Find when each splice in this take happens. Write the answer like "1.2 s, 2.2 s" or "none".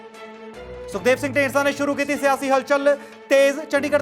0.9 s